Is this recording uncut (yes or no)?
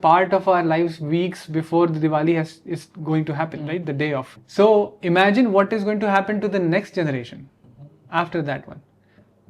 no